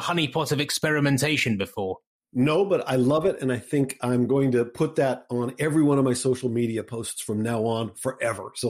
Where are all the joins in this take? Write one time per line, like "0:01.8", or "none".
none